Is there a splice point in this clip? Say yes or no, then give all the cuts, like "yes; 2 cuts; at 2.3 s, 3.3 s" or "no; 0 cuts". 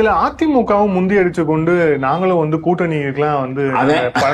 no; 0 cuts